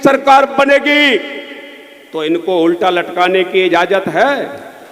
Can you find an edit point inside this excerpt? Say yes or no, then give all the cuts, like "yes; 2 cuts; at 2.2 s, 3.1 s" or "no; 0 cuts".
no; 0 cuts